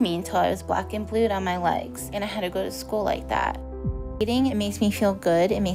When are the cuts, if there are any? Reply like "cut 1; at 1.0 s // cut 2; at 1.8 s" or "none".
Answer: none